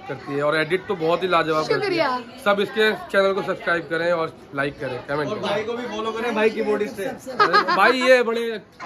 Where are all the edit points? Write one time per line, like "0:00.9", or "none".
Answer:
none